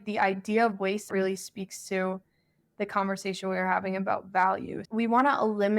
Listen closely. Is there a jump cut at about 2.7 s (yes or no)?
no